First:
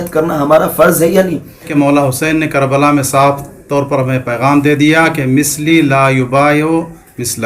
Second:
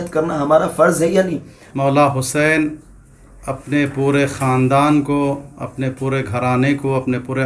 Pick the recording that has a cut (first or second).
first